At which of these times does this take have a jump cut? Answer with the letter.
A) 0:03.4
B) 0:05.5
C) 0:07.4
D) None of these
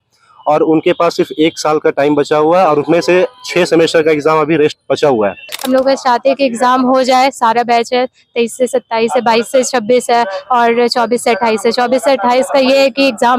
B